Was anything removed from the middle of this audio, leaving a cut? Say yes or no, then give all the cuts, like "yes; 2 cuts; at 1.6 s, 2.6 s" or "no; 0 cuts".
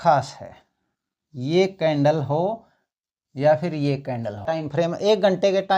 yes; 1 cut; at 4.4 s